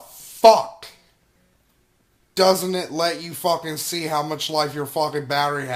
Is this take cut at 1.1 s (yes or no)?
no